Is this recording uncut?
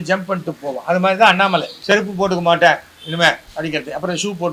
no; 1 cut; at 1.9 s

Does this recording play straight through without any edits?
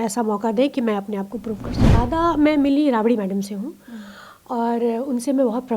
no; 1 cut; at 1.9 s

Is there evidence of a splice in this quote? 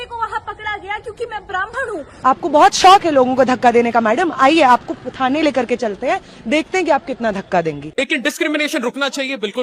yes; 2 cuts; at 2.1 s, 7.8 s

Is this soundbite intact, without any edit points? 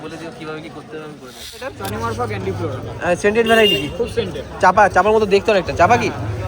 no; 1 cut; at 1.7 s

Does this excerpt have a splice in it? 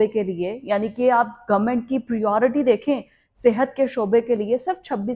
no; 0 cuts

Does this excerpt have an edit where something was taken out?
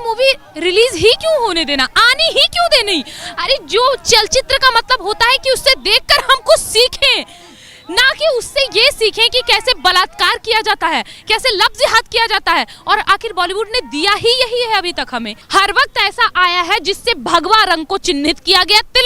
yes; 1 cut; at 15.4 s

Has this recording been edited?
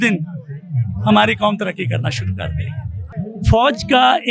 yes; 1 cut; at 3.1 s

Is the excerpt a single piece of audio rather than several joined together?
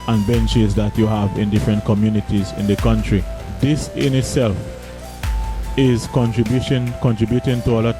no; 1 cut; at 3.4 s

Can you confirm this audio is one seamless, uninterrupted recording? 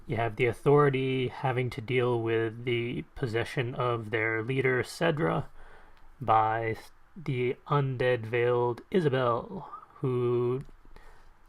no; 1 cut; at 2.6 s

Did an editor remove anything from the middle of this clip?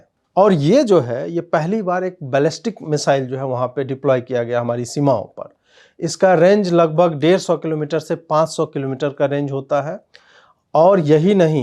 no; 0 cuts

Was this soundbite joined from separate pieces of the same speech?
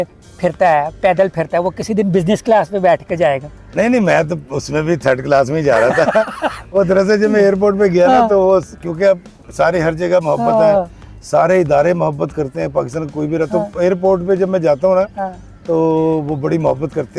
no; 0 cuts

